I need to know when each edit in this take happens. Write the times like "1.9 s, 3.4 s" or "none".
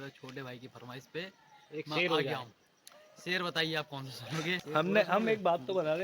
4.6 s